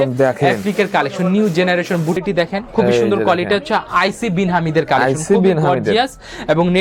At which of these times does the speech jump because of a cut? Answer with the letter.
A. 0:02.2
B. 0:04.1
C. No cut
A